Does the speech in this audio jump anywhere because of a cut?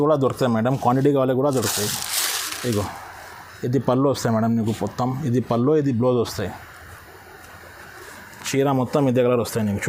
no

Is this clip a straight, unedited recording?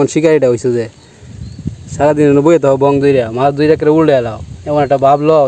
yes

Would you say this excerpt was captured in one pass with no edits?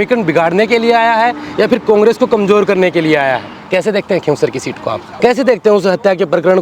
no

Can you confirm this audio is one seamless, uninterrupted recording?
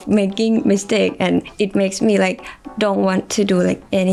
yes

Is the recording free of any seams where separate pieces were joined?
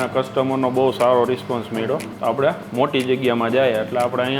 no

